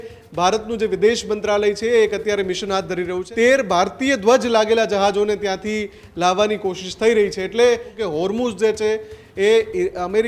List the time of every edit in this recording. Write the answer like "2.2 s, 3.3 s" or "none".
3.2 s, 8.0 s